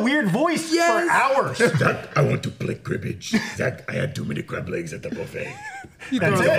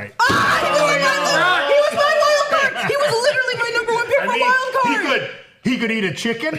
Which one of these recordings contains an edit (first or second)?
first